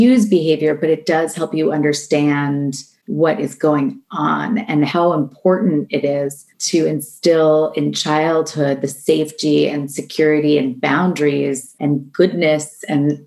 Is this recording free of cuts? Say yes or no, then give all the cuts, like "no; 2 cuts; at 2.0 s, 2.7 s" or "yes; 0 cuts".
no; 2 cuts; at 4.9 s, 11.7 s